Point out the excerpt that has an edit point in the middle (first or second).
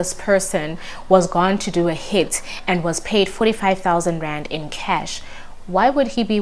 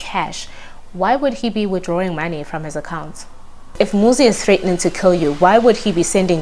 second